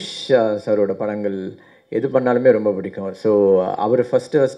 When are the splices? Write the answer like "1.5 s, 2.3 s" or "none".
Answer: none